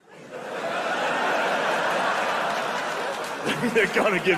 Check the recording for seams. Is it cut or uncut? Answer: uncut